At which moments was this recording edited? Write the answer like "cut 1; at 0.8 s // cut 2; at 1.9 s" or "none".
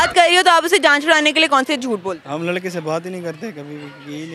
none